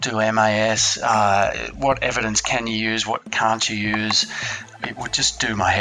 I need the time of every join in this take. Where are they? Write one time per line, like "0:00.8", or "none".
0:04.7